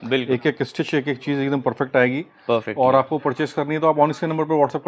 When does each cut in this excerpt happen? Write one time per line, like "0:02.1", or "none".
none